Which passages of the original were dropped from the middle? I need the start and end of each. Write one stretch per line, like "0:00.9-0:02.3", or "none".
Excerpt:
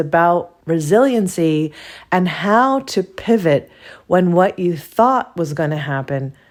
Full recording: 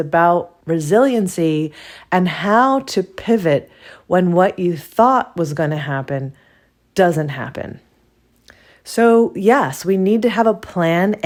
none